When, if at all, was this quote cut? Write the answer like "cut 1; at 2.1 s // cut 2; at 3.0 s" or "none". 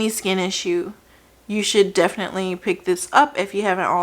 none